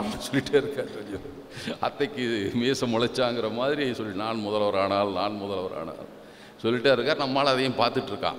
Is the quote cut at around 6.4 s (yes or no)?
no